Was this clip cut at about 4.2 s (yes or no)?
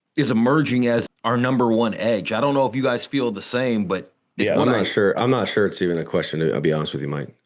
no